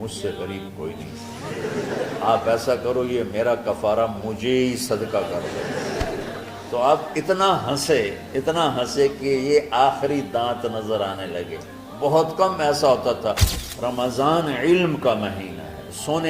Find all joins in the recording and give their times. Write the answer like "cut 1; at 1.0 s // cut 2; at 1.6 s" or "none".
cut 1; at 13.5 s